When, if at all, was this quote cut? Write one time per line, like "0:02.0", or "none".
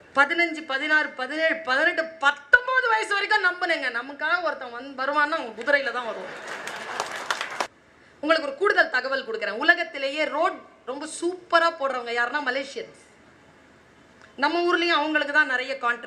0:07.7